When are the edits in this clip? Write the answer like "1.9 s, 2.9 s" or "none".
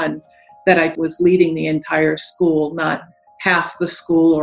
0.9 s